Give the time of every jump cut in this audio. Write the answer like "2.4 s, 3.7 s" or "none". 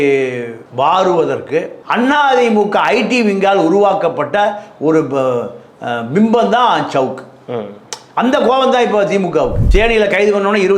9.6 s